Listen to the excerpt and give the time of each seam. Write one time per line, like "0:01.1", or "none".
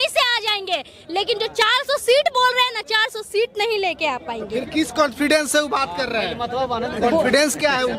none